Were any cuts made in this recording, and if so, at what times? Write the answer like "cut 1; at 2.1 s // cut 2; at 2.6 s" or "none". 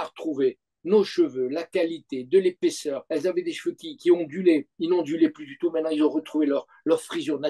cut 1; at 3.0 s